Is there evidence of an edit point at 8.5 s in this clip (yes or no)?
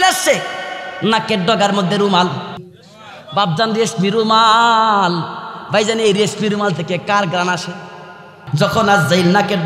yes